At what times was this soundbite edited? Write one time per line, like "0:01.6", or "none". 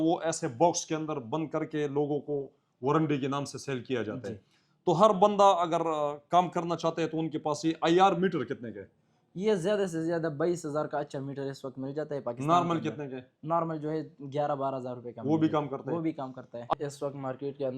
0:16.7